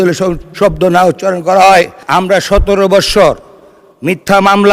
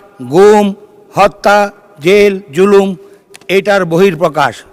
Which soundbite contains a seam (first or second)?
first